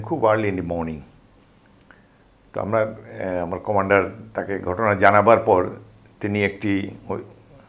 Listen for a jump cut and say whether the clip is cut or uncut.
uncut